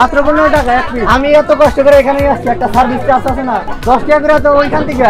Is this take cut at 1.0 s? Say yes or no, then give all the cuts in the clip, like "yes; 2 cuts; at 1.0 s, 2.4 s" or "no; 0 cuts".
yes; 2 cuts; at 1.0 s, 3.7 s